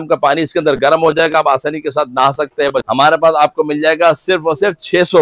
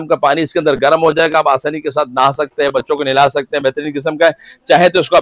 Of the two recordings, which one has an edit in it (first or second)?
first